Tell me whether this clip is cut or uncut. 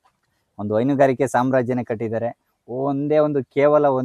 uncut